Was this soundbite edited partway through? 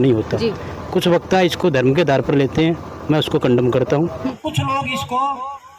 yes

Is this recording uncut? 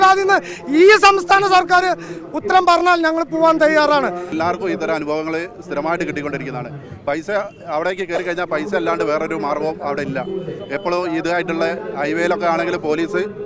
no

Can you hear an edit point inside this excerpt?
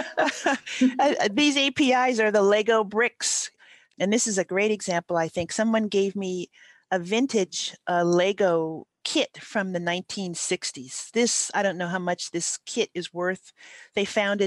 yes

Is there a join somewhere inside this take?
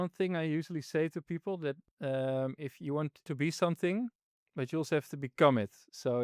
yes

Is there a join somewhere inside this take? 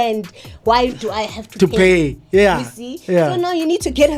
no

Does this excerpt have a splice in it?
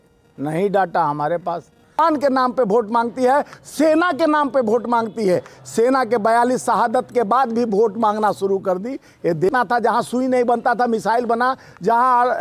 yes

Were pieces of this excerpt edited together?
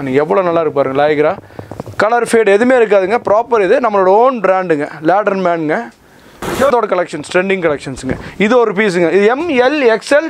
yes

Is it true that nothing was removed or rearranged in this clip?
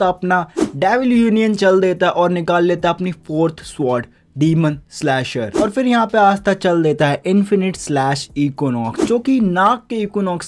yes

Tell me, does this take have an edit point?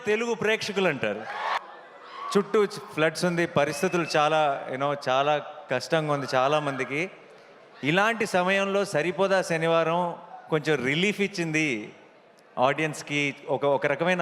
yes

